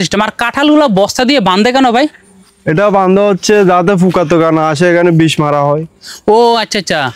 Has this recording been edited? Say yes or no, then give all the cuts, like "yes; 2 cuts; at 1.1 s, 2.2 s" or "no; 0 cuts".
no; 0 cuts